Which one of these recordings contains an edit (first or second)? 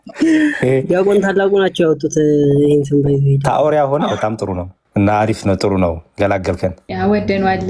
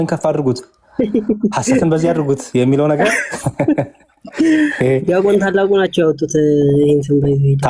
first